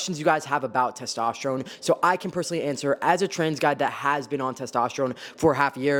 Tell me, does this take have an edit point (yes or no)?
no